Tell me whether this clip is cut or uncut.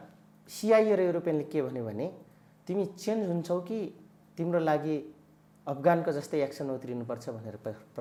uncut